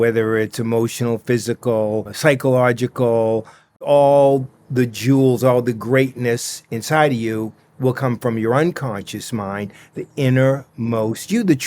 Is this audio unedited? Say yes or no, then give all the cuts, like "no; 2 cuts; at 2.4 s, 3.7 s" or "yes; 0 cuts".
no; 2 cuts; at 2.1 s, 3.9 s